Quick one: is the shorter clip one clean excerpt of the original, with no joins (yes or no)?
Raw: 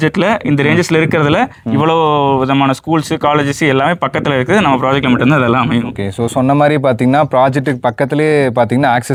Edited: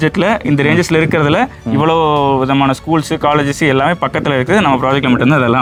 yes